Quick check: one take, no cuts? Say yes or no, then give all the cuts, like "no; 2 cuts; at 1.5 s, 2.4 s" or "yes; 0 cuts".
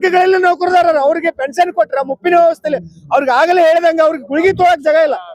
yes; 0 cuts